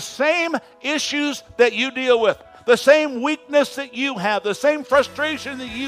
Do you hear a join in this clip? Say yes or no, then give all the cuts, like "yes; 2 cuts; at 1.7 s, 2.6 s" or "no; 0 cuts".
no; 0 cuts